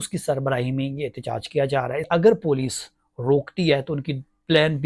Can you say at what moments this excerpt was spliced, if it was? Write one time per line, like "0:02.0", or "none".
0:02.1